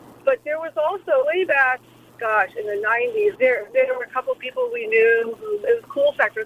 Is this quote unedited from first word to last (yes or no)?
yes